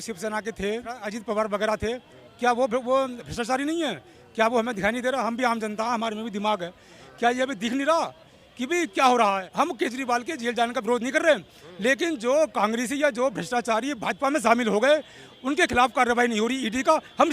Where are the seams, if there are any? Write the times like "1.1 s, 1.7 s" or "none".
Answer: 1.0 s, 9.5 s